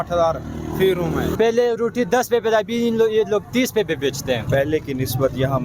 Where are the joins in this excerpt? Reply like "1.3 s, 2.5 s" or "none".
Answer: 1.3 s, 4.4 s